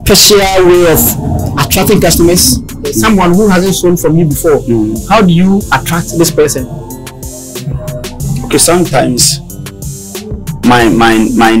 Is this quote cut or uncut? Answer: cut